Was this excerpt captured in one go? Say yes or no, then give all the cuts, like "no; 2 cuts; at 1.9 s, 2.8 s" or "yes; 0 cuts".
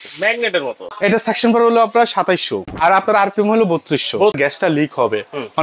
no; 3 cuts; at 0.9 s, 2.7 s, 4.4 s